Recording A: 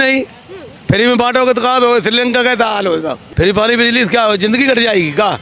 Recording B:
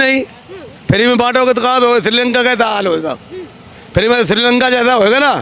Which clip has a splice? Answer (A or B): A